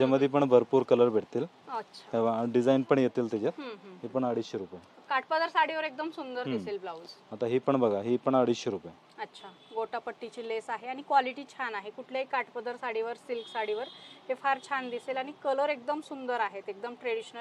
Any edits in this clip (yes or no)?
no